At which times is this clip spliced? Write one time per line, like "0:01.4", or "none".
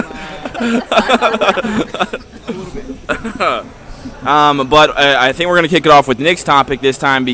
0:01.2